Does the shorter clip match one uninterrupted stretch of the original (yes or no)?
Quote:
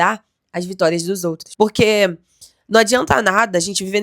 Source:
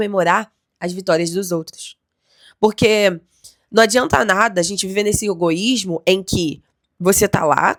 no